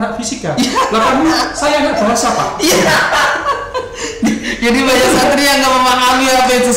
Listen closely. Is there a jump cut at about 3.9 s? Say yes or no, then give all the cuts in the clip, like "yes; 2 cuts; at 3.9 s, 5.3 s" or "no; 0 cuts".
no; 0 cuts